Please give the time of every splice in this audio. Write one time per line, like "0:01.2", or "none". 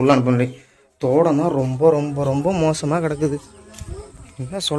none